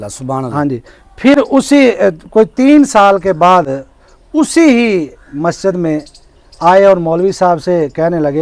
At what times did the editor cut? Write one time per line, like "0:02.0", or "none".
none